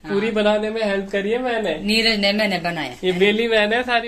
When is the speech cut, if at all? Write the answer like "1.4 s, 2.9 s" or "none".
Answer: none